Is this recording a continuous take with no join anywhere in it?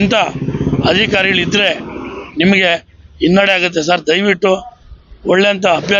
yes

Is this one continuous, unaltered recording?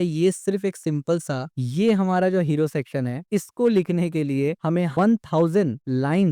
no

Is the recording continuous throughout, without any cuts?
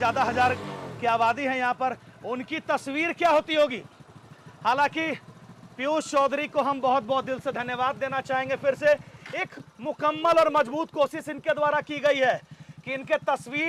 yes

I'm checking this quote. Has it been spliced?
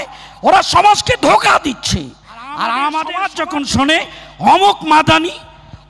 yes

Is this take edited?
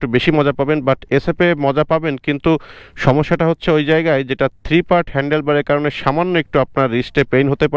no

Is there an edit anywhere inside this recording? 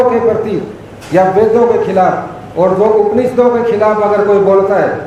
no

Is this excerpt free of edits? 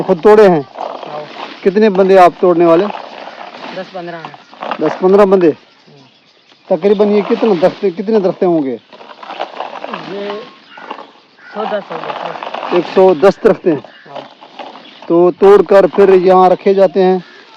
yes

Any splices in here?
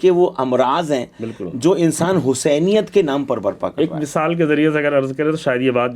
no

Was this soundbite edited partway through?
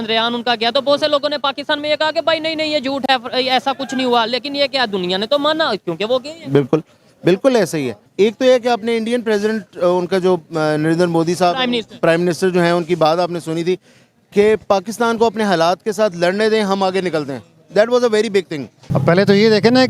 yes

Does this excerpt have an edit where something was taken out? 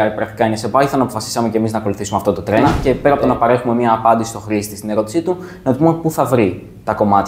yes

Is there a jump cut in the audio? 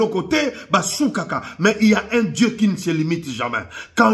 no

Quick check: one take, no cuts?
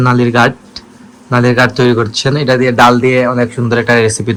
yes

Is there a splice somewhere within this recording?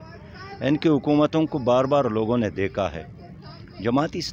no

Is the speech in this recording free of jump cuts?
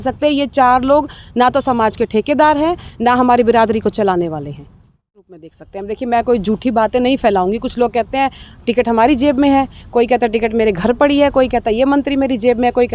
no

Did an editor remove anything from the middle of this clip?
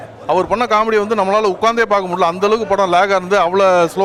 no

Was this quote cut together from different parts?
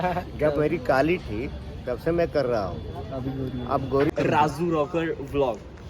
yes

